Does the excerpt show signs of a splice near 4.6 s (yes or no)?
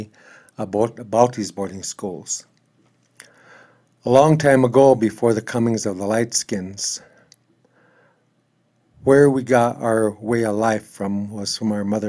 yes